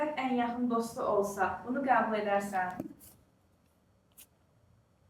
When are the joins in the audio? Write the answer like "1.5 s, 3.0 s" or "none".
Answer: none